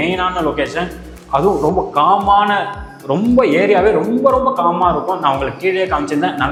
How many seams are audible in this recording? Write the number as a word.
zero